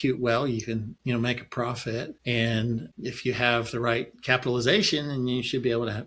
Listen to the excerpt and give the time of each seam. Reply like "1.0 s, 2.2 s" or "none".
0.9 s, 2.2 s, 2.9 s